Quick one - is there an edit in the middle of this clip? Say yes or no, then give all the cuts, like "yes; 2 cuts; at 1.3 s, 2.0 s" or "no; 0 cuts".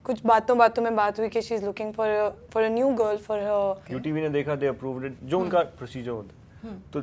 yes; 1 cut; at 3.8 s